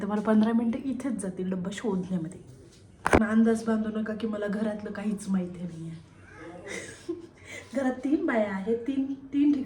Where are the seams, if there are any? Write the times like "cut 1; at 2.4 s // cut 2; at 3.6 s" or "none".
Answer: cut 1; at 3.2 s